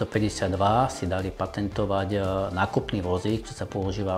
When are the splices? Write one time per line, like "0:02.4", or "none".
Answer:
none